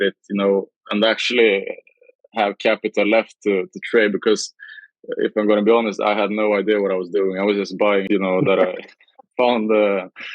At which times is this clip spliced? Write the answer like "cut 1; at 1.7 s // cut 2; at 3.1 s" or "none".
cut 1; at 8.1 s